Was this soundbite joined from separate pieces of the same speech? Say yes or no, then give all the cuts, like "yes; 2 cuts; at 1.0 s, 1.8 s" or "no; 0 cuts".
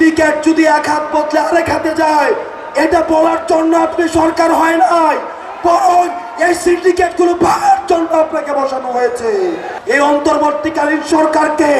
yes; 1 cut; at 9.7 s